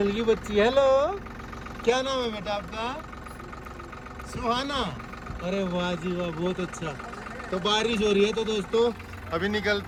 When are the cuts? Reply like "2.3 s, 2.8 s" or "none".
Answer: none